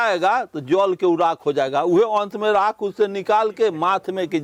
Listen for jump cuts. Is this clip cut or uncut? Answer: uncut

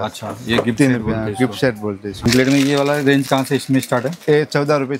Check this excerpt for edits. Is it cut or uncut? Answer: cut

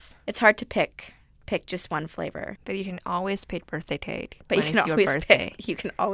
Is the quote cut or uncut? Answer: cut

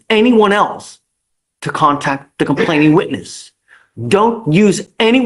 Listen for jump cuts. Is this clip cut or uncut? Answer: uncut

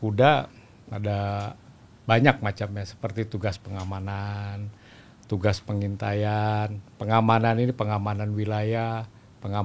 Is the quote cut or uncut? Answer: uncut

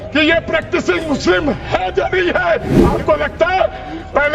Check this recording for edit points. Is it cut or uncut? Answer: cut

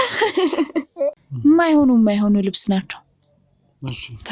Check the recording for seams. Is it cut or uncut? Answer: cut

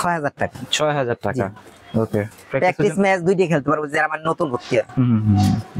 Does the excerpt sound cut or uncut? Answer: uncut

